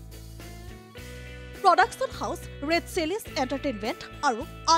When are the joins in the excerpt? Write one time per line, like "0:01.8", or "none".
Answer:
0:01.1